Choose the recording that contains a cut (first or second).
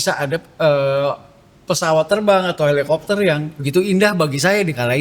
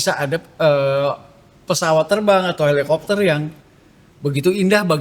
first